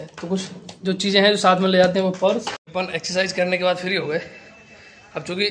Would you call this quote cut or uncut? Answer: cut